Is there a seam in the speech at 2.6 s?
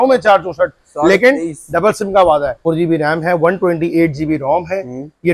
yes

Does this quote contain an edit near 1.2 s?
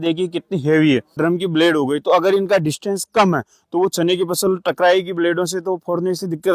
yes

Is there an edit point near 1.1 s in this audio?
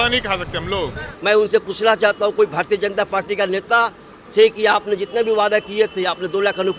yes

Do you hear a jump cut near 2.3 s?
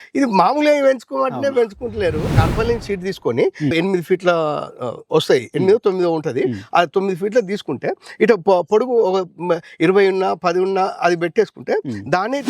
yes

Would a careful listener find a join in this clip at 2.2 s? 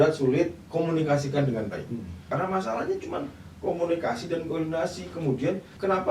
yes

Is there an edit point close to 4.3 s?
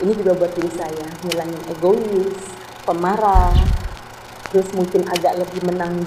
no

